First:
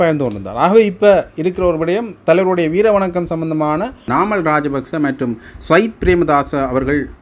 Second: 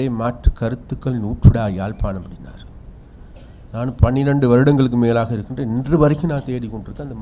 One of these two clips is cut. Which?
first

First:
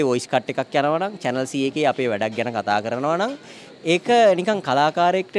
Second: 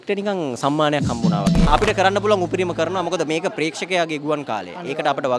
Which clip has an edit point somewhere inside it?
second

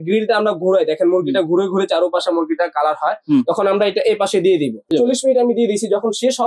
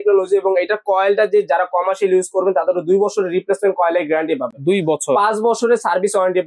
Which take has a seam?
first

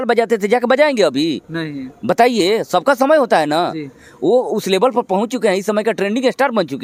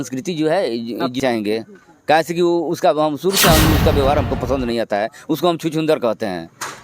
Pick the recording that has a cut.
second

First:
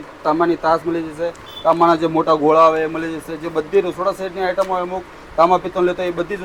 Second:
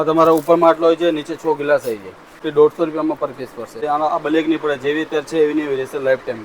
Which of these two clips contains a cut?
second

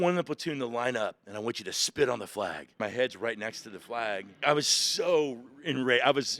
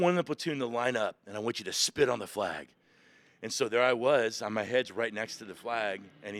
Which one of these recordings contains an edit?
first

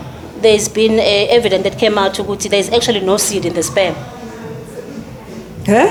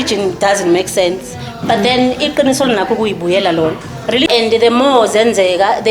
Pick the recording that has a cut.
second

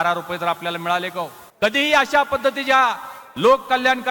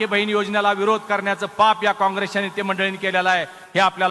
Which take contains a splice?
first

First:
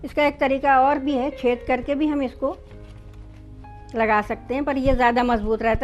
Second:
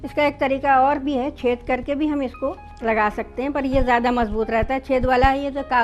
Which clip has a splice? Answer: second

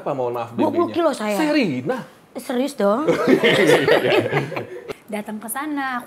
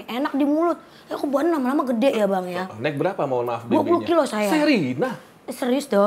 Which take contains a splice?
first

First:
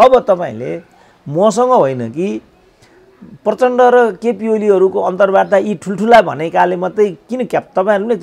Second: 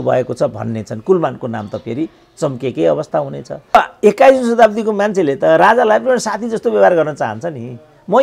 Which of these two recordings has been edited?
second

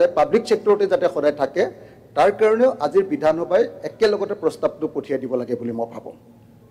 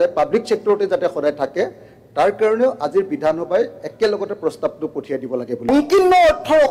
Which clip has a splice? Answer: second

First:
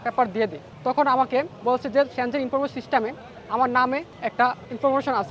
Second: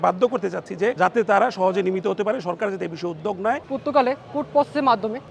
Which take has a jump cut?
second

